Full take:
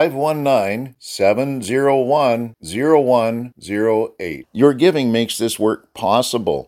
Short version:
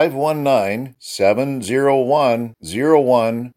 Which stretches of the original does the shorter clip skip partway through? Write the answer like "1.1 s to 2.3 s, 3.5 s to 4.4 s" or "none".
none